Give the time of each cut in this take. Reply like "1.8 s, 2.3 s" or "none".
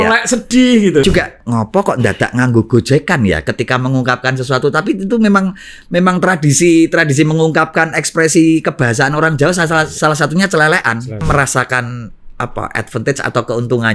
1.0 s, 11.2 s